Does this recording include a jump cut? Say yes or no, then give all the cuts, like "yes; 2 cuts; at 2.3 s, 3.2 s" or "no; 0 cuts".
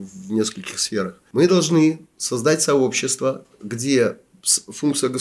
yes; 1 cut; at 1.2 s